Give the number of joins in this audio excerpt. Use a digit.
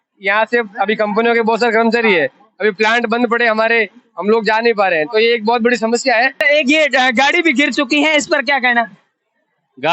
1